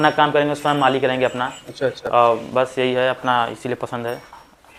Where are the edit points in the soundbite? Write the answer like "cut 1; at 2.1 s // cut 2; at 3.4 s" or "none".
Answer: none